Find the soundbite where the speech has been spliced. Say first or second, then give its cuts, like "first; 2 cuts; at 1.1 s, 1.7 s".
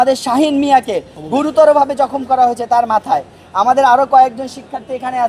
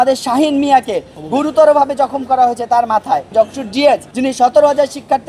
second; 2 cuts; at 3.3 s, 4.1 s